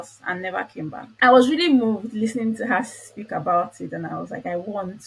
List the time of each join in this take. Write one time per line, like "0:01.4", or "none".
0:01.1